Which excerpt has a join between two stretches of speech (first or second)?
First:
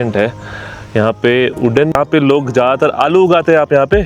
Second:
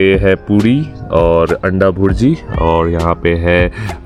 first